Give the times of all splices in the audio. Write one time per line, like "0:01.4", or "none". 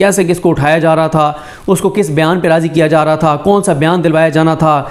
none